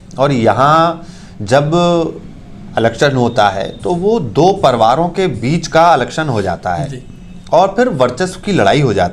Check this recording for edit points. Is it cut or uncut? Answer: uncut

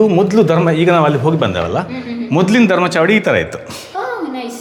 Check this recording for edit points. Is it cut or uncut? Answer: uncut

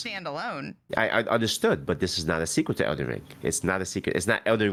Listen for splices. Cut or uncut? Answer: uncut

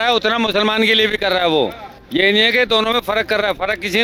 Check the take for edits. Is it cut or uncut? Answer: uncut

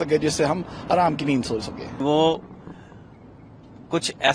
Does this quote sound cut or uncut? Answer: cut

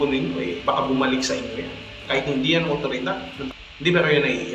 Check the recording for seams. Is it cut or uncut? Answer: cut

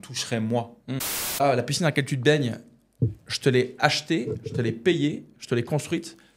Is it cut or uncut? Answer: cut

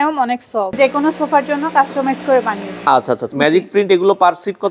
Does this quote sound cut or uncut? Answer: cut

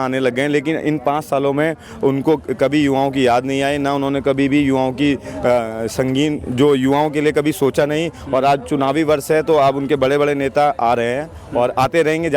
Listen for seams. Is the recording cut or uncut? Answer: uncut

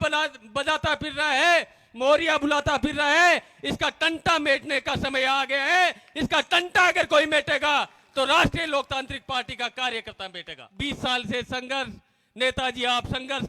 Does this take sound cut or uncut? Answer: cut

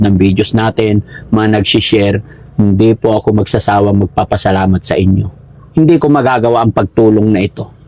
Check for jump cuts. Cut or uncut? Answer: uncut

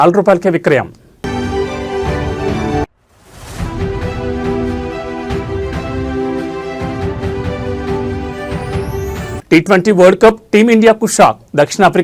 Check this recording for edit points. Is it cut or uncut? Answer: cut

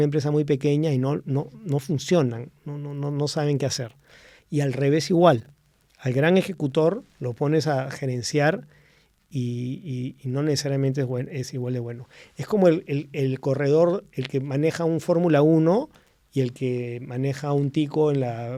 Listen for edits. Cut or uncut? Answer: uncut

